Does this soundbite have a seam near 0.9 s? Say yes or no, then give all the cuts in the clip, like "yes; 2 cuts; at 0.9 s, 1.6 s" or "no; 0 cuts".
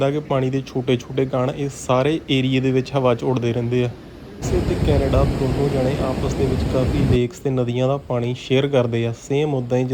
no; 1 cut; at 4.5 s